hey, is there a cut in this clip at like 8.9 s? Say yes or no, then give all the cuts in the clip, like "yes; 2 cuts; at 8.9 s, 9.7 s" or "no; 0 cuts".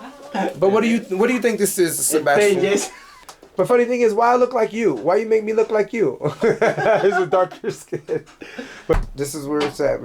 yes; 2 cuts; at 3.2 s, 8.9 s